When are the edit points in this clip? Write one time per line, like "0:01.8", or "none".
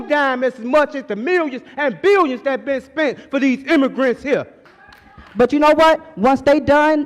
0:04.6